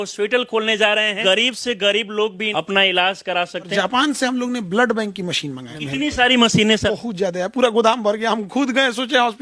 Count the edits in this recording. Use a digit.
5